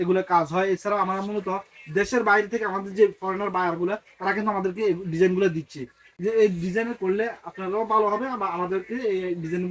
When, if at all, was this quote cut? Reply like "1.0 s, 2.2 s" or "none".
none